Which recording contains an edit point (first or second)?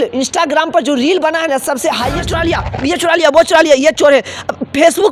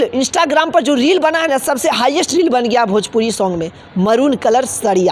first